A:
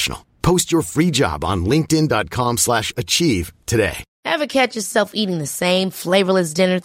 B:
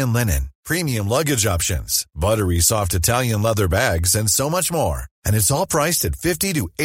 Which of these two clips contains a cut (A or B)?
A